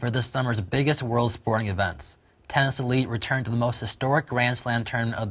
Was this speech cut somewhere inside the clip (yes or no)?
no